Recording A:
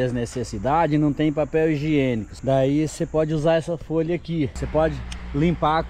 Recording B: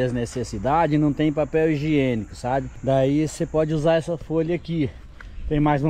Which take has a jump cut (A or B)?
A